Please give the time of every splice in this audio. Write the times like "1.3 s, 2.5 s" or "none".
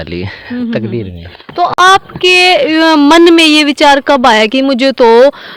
none